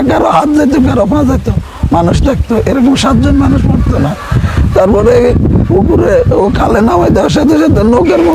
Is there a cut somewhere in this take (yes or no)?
no